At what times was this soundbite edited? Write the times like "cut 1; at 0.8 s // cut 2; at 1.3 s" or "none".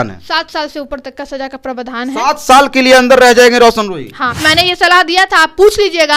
cut 1; at 4.4 s